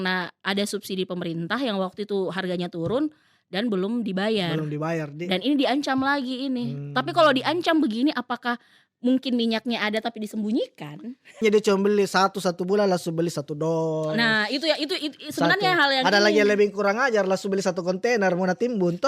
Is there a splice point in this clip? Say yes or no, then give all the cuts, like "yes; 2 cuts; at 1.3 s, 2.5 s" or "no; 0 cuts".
yes; 1 cut; at 11.4 s